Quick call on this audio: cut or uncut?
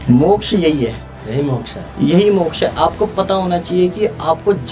uncut